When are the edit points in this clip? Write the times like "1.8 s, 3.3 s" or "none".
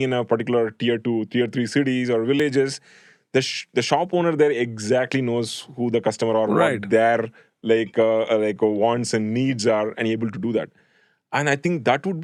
none